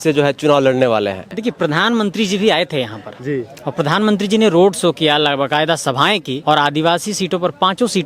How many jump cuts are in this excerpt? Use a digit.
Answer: 2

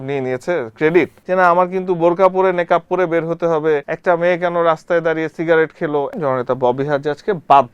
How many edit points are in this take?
3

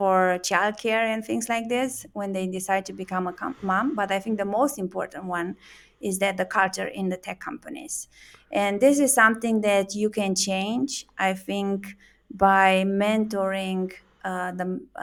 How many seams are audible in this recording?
0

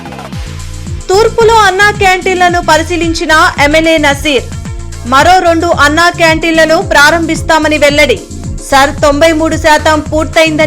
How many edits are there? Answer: 1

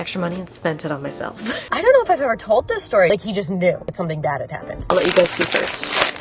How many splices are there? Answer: 3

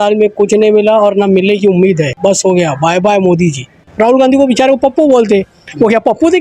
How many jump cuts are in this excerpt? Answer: 2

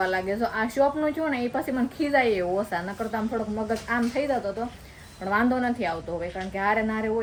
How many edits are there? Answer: 0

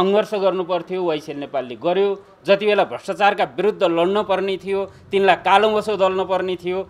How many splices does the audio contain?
0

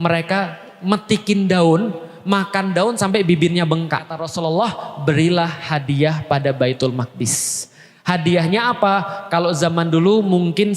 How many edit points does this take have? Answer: 1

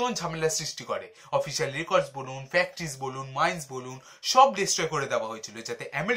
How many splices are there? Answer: 0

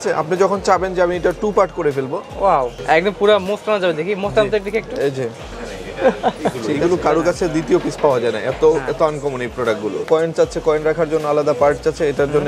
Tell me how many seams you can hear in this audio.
3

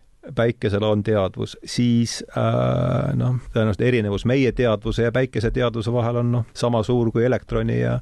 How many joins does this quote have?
2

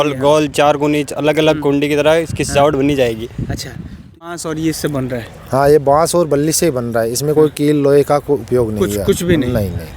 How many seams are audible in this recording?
1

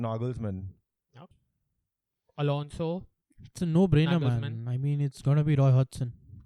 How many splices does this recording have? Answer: 1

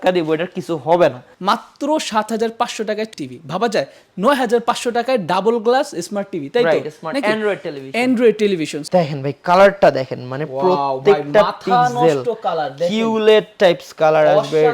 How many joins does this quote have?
3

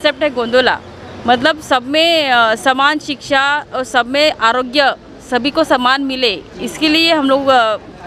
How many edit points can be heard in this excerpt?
0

